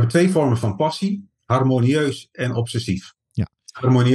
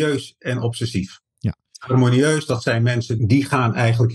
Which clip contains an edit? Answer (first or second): second